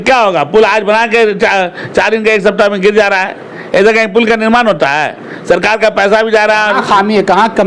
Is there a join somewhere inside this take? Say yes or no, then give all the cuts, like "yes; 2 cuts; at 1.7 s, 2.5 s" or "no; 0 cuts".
no; 0 cuts